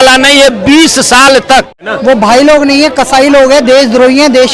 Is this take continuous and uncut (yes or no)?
no